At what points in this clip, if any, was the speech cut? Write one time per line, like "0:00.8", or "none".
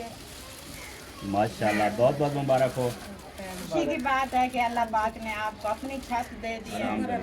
0:03.7